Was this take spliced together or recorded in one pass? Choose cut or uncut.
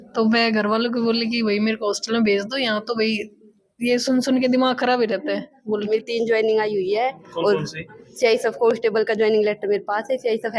cut